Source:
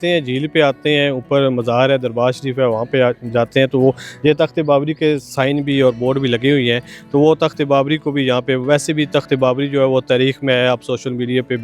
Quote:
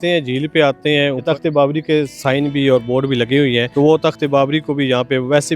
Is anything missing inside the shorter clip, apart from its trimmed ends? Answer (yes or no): yes